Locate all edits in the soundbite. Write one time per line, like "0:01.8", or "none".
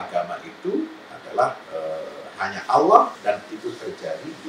0:01.6
0:03.2